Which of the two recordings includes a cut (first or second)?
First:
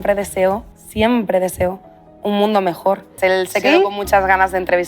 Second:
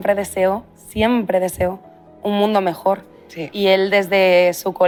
first